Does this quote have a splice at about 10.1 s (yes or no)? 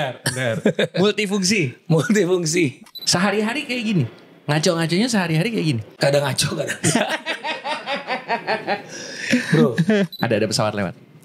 yes